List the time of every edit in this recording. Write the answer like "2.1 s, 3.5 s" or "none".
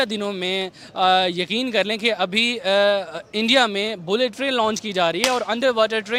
none